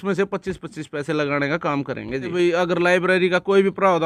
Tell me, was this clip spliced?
yes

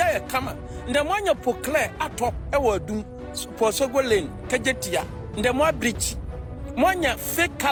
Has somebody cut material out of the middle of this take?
no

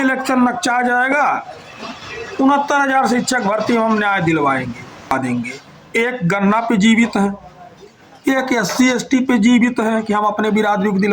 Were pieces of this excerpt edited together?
yes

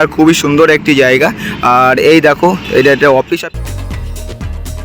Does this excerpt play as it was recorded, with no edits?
no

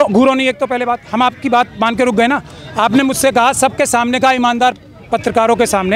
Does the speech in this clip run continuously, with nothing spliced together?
yes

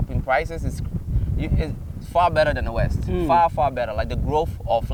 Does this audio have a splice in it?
no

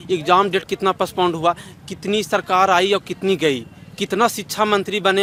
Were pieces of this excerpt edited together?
no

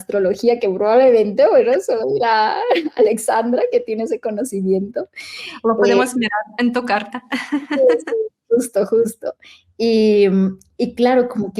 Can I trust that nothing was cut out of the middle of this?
yes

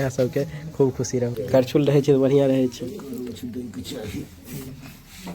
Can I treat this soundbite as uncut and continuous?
no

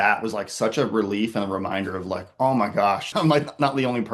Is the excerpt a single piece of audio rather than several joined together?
no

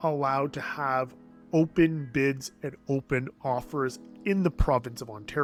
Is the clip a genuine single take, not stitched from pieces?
yes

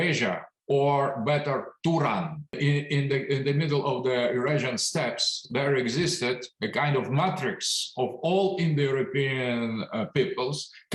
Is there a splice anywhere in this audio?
yes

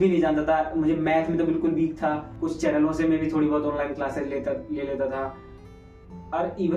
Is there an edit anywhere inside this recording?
yes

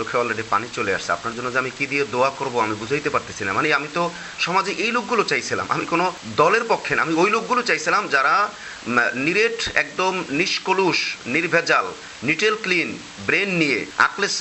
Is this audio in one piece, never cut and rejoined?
yes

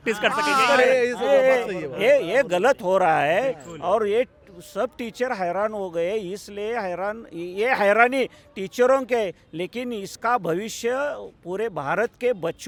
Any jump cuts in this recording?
no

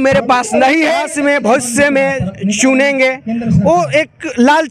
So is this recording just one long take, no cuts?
no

